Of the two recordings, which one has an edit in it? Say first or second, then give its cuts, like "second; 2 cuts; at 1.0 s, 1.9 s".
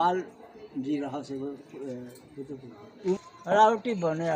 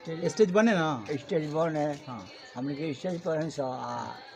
first; 1 cut; at 3.2 s